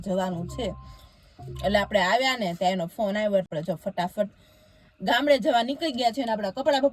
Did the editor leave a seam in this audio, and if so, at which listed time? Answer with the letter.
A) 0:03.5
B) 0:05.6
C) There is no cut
A